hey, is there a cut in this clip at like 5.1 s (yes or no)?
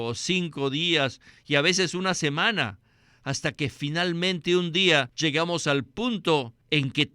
yes